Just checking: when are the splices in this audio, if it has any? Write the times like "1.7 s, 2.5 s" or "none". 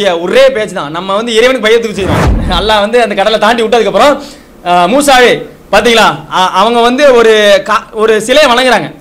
2.3 s